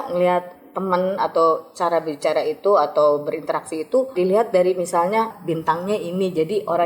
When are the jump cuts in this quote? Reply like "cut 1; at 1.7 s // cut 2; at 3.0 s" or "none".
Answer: cut 1; at 4.1 s // cut 2; at 5.4 s